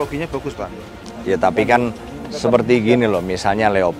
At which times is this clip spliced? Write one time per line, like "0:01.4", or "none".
none